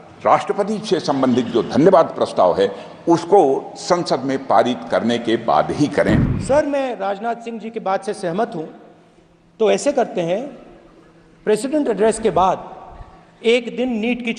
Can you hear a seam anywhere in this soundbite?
yes; 1 cut; at 6.3 s

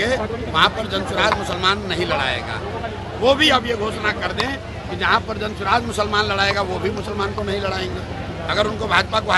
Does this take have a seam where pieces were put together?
no; 0 cuts

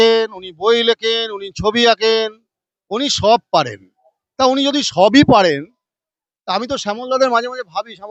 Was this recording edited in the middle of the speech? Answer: no; 0 cuts

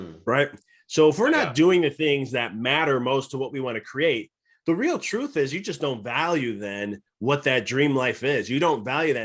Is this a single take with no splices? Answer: yes; 0 cuts

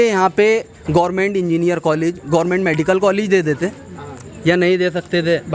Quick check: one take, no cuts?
yes; 0 cuts

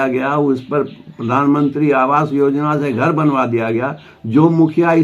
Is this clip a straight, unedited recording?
yes; 0 cuts

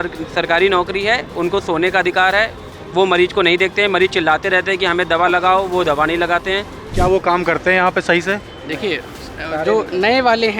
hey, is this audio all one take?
no; 1 cut; at 6.8 s

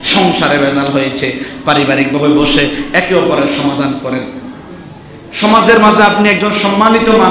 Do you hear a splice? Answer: no; 0 cuts

